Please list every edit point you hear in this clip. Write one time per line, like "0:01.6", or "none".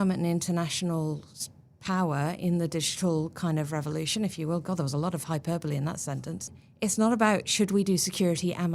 0:06.6

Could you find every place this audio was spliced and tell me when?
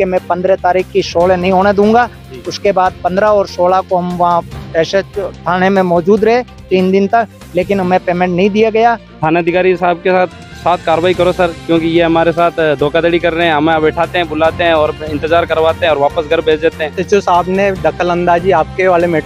0:09.1
0:17.0

